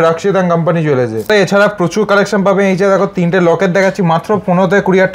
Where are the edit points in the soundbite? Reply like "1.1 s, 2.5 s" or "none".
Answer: 1.3 s